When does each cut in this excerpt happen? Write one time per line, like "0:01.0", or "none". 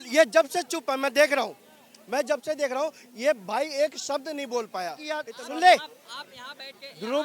0:05.3

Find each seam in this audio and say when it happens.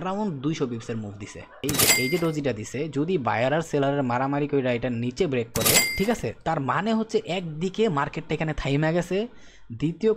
0:01.6
0:05.9

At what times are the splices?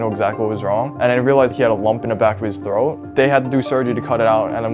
0:01.5

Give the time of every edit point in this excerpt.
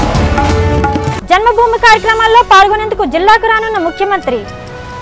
0:01.1

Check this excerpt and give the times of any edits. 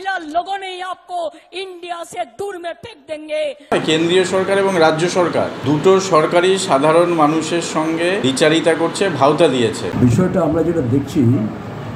0:03.7
0:05.6
0:08.2
0:09.8

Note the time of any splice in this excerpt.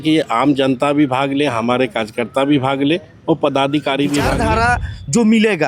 0:04.4

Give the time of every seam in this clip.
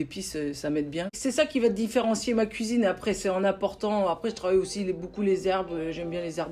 0:01.1

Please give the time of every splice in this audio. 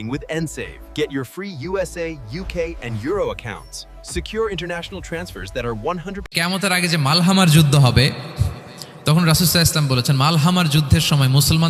0:06.3

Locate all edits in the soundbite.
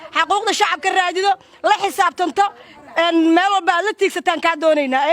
none

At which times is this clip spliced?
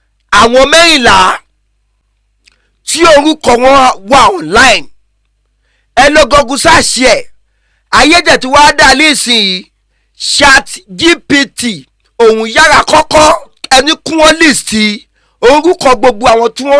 0:13.5

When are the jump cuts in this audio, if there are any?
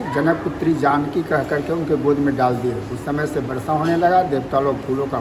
none

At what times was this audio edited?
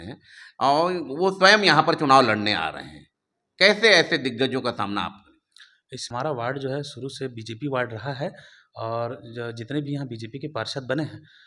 0:06.0

